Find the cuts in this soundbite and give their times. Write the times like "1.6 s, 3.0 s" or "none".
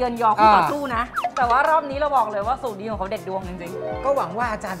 1.2 s